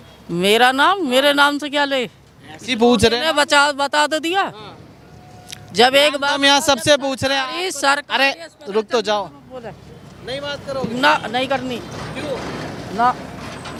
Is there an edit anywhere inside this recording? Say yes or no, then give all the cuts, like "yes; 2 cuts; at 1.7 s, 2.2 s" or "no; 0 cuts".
no; 0 cuts